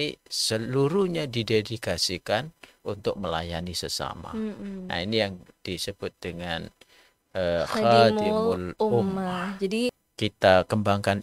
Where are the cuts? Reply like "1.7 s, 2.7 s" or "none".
10.1 s